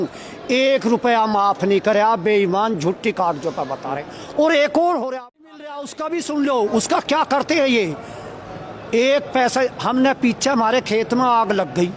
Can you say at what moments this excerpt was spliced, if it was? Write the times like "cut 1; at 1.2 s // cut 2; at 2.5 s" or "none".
cut 1; at 5.2 s